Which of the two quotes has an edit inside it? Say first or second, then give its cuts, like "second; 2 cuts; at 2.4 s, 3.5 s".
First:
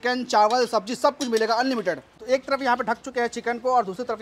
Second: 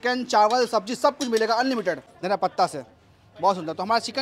second; 1 cut; at 2.1 s